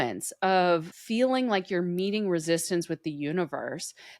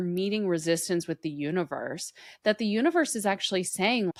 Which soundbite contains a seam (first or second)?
first